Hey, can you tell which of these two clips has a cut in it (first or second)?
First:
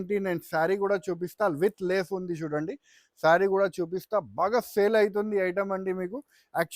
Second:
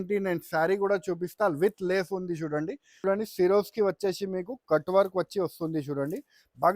second